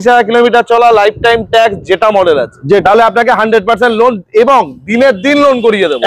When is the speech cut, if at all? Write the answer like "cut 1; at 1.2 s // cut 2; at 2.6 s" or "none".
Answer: cut 1; at 2.8 s